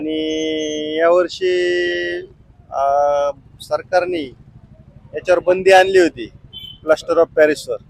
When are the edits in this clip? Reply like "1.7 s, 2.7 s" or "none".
none